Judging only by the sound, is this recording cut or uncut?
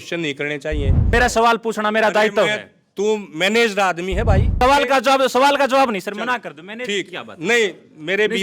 cut